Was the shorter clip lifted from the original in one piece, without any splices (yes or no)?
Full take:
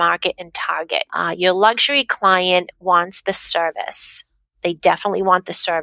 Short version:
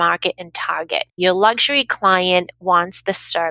no